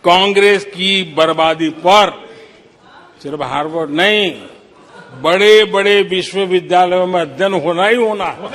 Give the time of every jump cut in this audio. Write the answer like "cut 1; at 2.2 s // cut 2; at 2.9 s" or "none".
none